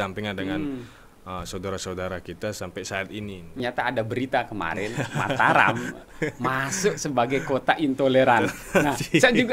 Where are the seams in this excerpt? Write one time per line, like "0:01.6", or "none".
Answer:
0:03.6